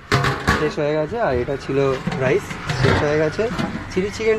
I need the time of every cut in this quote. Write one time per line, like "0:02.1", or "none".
none